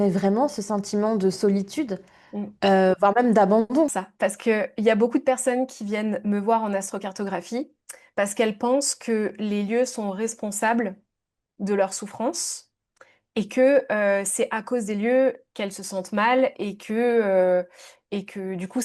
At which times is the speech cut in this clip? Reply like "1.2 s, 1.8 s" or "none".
4.0 s